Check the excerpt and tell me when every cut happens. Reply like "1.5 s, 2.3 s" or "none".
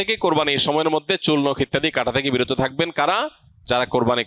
none